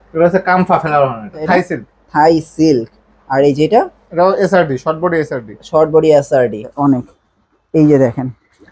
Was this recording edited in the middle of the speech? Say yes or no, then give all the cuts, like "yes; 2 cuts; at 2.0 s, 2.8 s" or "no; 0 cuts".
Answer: yes; 2 cuts; at 1.5 s, 6.7 s